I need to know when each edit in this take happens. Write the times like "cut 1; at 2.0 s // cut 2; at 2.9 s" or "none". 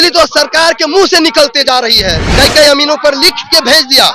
cut 1; at 2.2 s